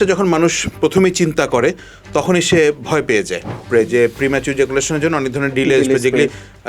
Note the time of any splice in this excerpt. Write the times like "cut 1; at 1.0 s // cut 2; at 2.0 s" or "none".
cut 1; at 3.6 s